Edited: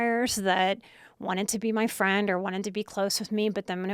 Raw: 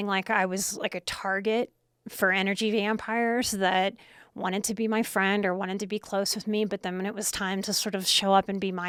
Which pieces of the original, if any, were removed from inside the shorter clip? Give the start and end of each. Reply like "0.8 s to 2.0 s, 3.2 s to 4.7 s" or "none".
none

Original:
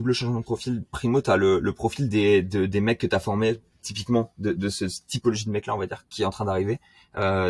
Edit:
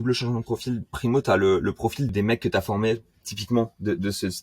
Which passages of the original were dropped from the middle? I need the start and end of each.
2.1 s to 2.7 s

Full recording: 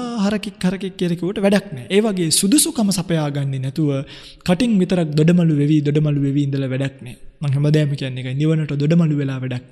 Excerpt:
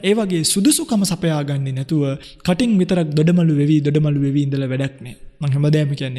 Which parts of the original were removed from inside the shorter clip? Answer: 4.1 s to 4.3 s

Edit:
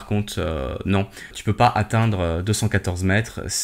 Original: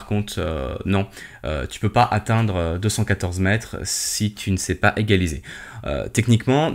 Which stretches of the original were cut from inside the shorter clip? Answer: 1.3 s to 1.7 s

